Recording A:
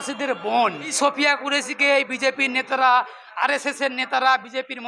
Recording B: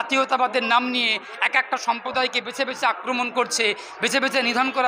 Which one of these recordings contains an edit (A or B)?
A